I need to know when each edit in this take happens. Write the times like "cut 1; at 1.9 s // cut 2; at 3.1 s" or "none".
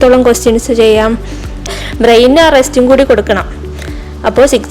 cut 1; at 1.8 s